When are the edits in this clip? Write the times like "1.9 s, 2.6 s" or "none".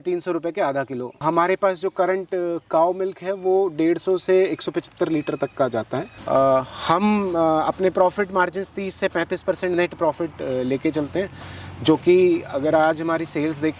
1.2 s, 6.1 s